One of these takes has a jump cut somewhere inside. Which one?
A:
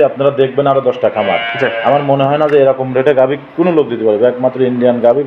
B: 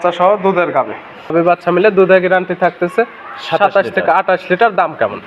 B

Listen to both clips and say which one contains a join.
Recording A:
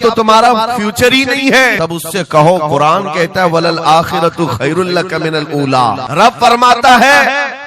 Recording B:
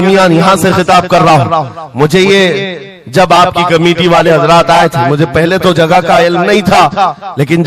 A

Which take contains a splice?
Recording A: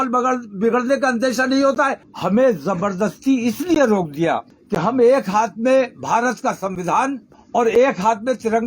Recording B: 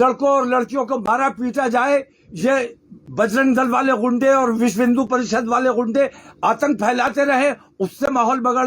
A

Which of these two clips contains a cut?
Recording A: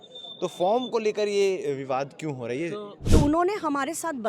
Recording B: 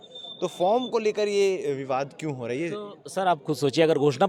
A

